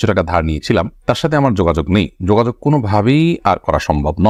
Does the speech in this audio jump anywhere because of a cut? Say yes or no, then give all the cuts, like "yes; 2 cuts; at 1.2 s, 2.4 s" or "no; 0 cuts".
no; 0 cuts